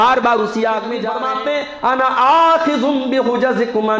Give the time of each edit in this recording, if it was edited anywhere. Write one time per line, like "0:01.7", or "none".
0:01.1